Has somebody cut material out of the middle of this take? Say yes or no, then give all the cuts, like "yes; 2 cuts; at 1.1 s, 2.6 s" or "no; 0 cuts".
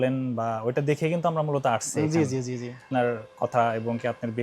yes; 1 cut; at 2.9 s